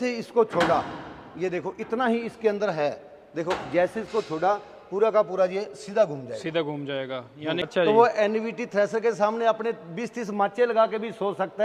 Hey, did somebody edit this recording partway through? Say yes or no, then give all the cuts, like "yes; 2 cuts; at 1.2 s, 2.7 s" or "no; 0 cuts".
yes; 1 cut; at 7.6 s